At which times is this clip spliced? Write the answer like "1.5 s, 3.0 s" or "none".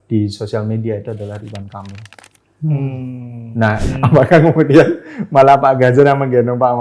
3.8 s